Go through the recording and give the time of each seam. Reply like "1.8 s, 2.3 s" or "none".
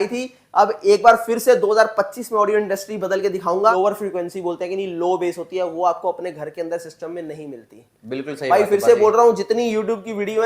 3.7 s

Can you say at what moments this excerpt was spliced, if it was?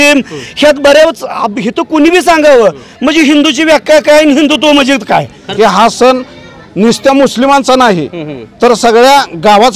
5.4 s

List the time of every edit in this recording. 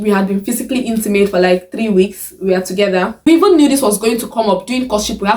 3.3 s

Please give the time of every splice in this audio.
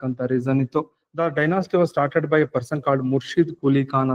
1.0 s

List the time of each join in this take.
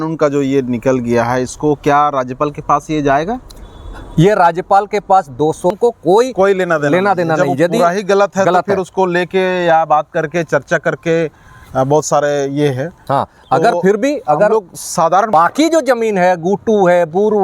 5.8 s, 15.3 s

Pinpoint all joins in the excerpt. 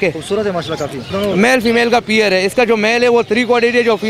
1.1 s

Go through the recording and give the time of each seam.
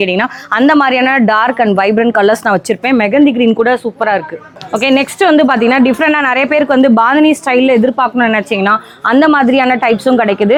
none

